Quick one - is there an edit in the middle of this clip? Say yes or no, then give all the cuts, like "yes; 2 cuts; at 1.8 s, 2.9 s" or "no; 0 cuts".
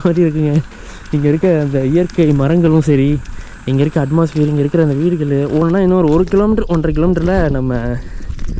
yes; 1 cut; at 5.7 s